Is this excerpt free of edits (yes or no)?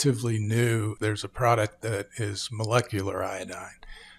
no